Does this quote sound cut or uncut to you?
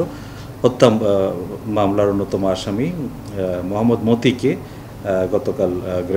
uncut